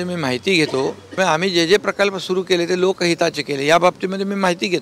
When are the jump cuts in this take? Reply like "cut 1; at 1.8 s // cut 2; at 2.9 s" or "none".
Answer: cut 1; at 1.2 s